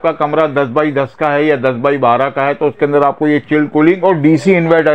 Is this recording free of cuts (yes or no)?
yes